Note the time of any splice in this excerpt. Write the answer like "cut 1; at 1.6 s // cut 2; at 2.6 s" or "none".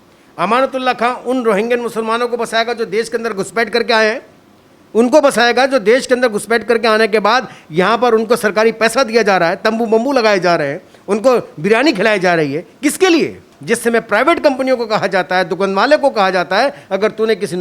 cut 1; at 13.5 s